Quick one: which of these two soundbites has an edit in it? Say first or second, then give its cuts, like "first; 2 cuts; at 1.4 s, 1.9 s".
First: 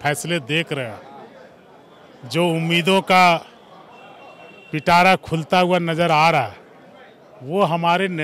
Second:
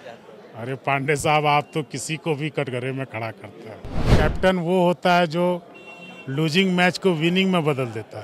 second; 1 cut; at 4.0 s